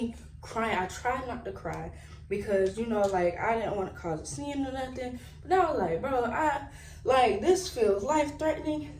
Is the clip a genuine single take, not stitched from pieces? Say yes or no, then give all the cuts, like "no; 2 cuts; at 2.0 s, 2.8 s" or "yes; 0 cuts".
yes; 0 cuts